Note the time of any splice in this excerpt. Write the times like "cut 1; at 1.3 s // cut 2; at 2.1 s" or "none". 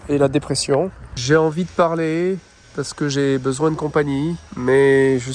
cut 1; at 1.1 s // cut 2; at 2.6 s // cut 3; at 4.5 s